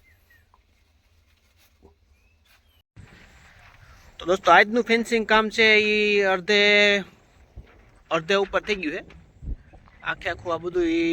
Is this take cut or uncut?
cut